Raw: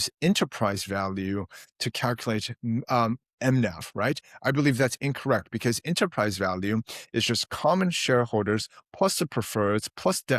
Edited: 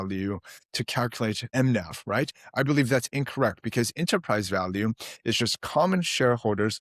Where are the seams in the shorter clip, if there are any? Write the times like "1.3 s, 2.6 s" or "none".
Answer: 1.4 s